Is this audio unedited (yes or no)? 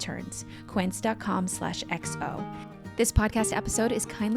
no